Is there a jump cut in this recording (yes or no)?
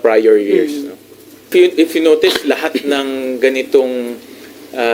yes